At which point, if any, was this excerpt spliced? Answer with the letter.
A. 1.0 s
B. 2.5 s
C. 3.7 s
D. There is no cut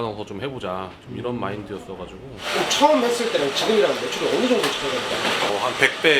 B